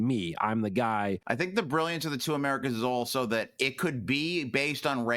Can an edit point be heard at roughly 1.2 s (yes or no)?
yes